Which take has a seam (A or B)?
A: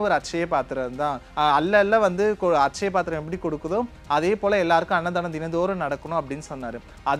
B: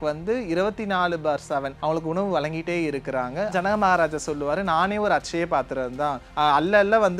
B